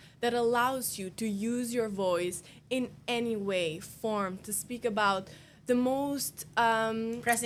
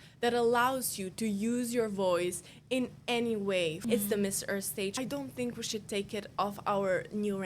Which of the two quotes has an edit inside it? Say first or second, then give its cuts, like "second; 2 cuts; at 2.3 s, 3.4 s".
second; 3 cuts; at 3.8 s, 4.9 s, 6.3 s